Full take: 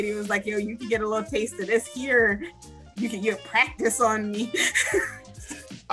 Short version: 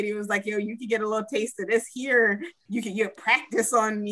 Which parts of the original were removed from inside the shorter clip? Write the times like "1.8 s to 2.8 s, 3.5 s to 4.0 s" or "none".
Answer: 2.5 s to 2.8 s